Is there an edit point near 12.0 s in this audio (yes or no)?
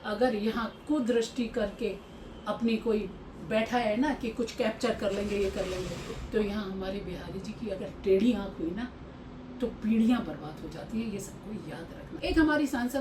yes